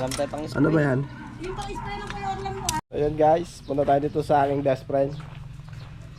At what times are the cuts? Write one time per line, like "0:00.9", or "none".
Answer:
0:02.9